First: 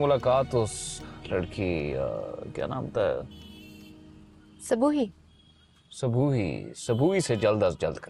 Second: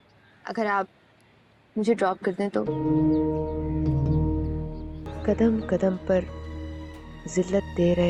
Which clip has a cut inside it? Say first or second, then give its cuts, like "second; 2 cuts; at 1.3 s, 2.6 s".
second; 1 cut; at 4.9 s